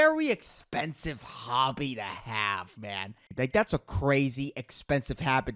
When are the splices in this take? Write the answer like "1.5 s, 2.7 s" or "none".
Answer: 3.2 s